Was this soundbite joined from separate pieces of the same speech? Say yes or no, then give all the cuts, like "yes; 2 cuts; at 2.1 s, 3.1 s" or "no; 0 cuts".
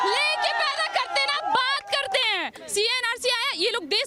yes; 1 cut; at 2.6 s